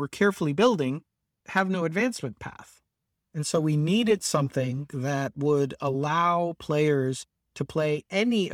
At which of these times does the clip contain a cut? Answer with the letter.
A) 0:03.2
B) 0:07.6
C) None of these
C